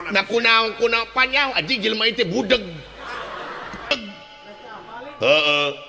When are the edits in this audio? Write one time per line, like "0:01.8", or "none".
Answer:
0:03.9